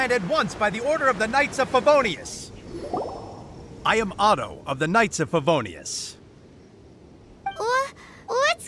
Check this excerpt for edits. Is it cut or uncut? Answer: uncut